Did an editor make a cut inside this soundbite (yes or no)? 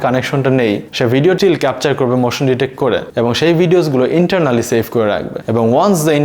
yes